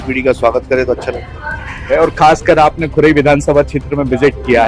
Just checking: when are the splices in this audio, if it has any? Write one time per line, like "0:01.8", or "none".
0:01.9